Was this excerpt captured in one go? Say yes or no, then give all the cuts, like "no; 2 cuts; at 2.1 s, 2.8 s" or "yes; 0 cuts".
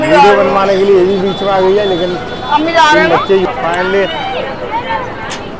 no; 1 cut; at 3.4 s